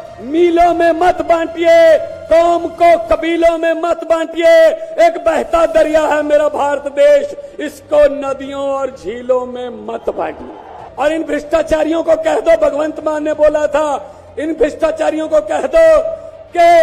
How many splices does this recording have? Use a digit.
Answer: 1